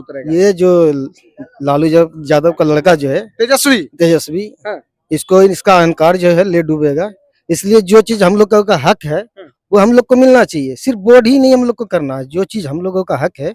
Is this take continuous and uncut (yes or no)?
yes